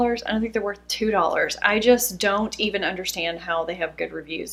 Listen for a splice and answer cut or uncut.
uncut